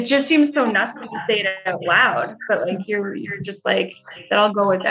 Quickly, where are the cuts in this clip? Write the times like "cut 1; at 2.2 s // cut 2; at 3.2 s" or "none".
none